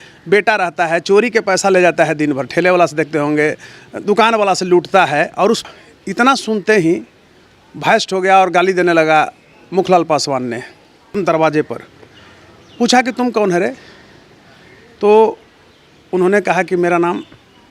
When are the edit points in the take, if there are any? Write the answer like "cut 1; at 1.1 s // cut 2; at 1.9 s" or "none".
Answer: cut 1; at 5.6 s // cut 2; at 11.1 s

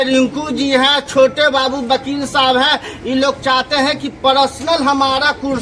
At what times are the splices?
none

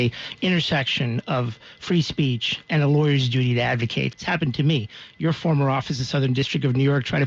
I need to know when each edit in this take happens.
cut 1; at 4.1 s

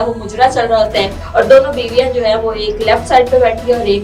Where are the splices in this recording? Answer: cut 1; at 1.2 s

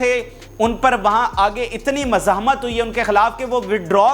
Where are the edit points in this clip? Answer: none

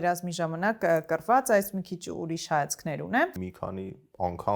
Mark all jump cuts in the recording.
cut 1; at 3.4 s

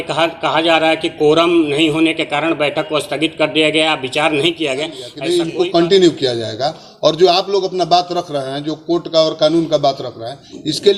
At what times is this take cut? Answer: cut 1; at 5.1 s

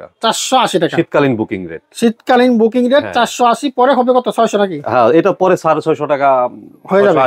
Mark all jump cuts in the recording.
none

